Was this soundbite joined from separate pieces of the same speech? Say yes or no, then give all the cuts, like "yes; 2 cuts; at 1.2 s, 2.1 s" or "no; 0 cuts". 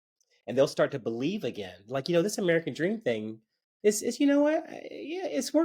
no; 0 cuts